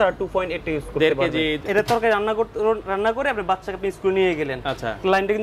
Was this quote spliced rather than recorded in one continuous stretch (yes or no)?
yes